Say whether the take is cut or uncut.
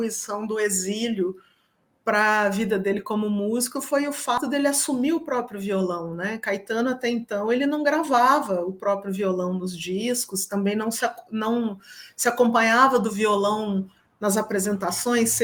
uncut